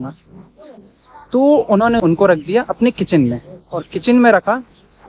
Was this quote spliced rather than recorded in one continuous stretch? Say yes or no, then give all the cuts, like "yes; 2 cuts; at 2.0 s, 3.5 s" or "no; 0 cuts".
no; 0 cuts